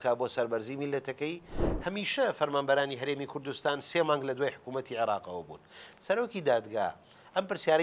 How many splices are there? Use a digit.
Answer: 1